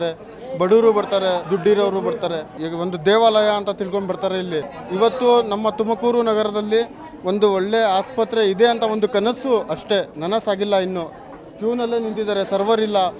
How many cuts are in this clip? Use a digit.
4